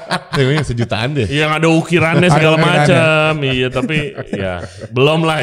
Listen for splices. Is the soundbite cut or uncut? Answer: uncut